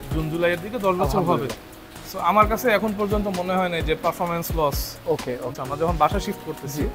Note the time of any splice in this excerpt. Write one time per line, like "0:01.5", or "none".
0:05.5